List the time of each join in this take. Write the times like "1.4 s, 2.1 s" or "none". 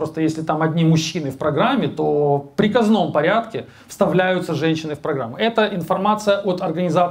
none